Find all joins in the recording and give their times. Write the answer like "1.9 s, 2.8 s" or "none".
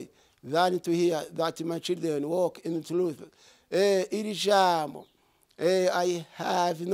none